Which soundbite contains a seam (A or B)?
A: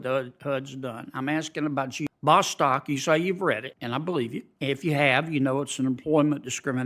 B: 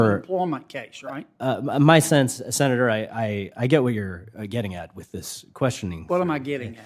A